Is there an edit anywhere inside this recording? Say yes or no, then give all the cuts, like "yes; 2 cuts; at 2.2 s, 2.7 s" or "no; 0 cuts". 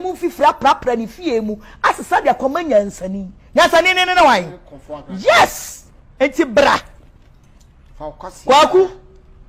no; 0 cuts